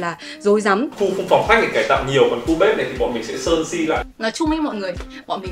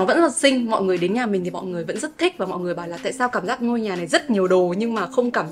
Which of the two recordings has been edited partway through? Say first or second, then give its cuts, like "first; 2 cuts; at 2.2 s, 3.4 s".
first; 2 cuts; at 0.9 s, 4.1 s